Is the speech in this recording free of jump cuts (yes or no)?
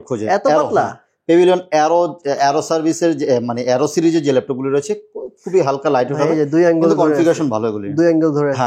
yes